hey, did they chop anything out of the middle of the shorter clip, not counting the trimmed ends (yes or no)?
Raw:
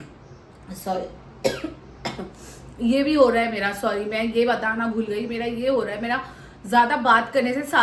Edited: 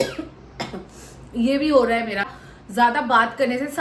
yes